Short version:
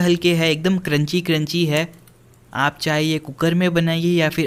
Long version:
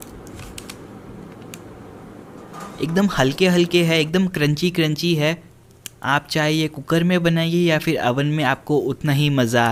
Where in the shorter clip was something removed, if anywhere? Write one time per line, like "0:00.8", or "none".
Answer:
none